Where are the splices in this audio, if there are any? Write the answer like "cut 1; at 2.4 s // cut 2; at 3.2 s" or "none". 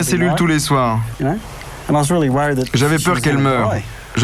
cut 1; at 1.1 s